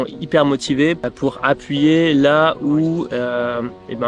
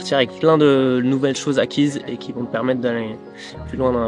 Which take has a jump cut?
first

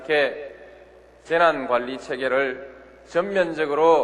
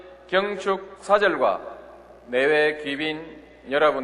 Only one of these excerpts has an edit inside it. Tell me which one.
first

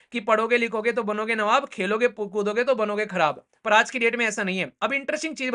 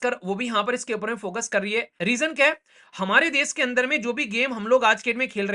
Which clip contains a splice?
second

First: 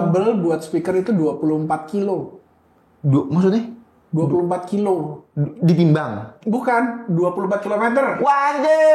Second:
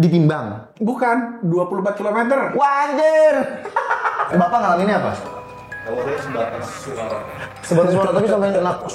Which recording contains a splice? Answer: second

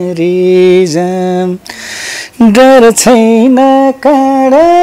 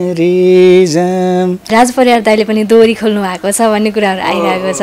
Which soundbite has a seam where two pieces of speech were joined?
second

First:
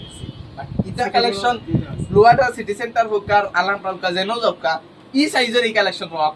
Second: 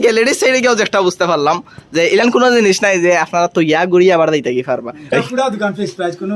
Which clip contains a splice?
second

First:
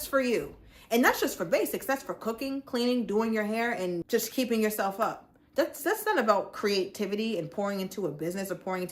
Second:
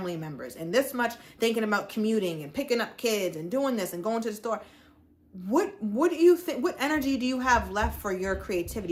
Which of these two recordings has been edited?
first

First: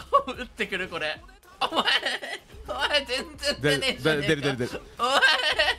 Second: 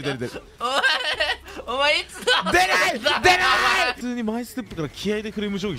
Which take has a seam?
second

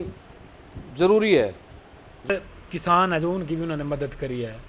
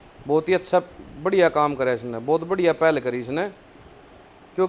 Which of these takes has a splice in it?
first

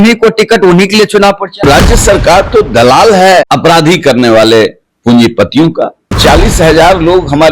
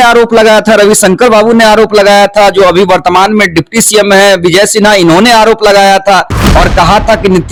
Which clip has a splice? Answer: first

